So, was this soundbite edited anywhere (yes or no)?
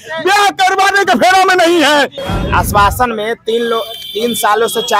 yes